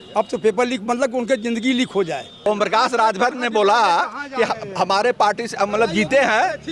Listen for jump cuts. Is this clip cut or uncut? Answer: cut